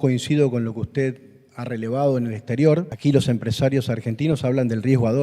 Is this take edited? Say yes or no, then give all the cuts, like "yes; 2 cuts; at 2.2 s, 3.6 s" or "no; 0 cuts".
yes; 1 cut; at 2.9 s